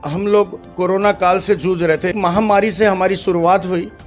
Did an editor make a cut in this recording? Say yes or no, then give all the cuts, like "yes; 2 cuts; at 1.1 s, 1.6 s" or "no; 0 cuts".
yes; 1 cut; at 2.1 s